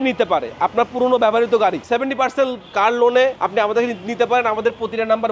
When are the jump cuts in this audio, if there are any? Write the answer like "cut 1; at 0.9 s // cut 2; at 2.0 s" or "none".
cut 1; at 1.8 s